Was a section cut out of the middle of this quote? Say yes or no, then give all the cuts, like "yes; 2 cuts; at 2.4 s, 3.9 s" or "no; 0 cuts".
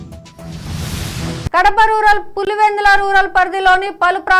no; 0 cuts